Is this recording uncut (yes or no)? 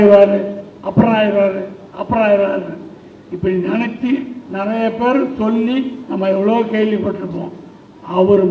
yes